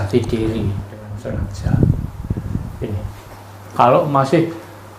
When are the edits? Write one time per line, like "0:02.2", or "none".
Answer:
0:01.1